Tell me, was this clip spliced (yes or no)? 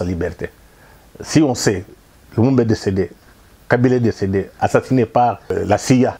no